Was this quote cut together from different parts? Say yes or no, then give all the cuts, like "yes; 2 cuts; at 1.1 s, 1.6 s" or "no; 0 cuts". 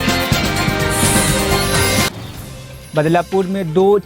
no; 0 cuts